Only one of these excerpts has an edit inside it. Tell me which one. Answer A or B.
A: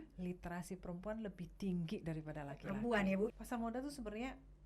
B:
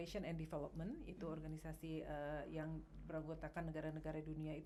A